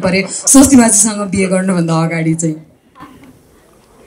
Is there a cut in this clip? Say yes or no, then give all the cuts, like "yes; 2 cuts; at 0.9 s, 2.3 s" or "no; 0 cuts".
no; 0 cuts